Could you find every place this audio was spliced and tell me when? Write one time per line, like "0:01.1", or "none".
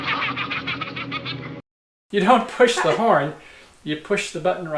0:01.8